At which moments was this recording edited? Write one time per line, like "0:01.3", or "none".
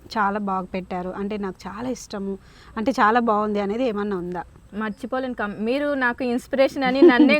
0:04.6